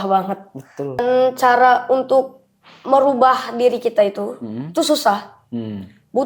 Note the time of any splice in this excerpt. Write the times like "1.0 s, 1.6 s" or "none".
1.0 s